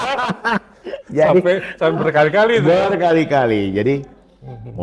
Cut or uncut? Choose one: uncut